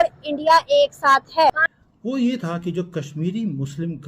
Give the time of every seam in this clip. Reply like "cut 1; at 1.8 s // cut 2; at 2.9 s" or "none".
cut 1; at 1.6 s